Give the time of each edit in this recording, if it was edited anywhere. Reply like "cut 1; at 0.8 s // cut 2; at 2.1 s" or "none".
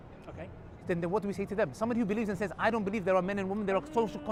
none